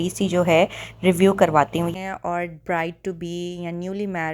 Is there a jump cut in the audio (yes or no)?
yes